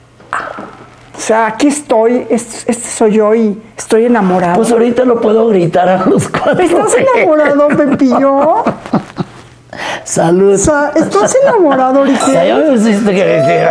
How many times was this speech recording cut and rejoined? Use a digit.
0